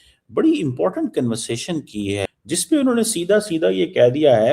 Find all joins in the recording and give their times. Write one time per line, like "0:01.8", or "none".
0:02.3